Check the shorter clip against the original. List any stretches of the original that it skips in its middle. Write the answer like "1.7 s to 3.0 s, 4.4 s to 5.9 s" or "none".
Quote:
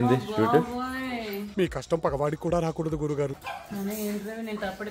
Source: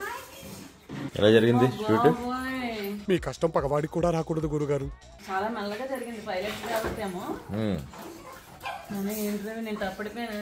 5.0 s to 8.7 s